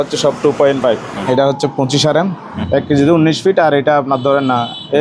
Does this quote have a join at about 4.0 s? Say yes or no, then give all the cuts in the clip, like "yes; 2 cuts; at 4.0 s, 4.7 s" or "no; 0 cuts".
no; 2 cuts; at 1.1 s, 2.5 s